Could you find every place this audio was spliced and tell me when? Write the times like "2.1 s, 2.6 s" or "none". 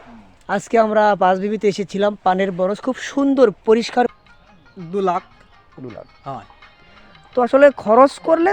4.1 s

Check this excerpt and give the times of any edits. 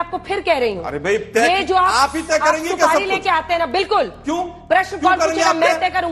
none

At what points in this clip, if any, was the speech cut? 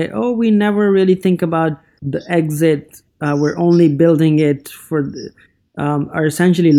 1.9 s

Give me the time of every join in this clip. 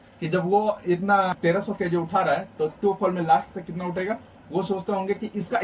1.3 s

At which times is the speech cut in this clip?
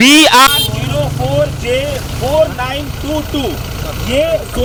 none

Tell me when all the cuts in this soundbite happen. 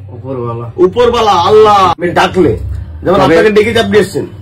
2.0 s

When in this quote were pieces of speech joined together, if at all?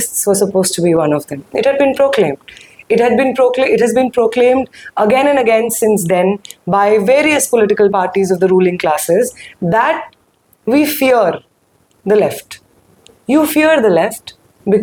none

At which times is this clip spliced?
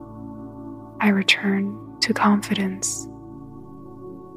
1.0 s, 2.8 s

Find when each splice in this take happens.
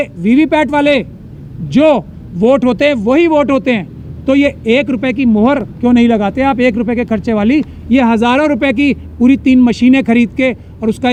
none

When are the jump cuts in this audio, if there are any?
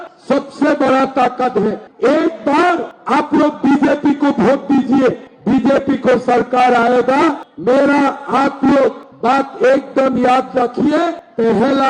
1.9 s

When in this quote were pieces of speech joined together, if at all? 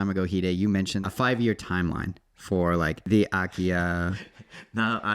1.0 s, 3.0 s

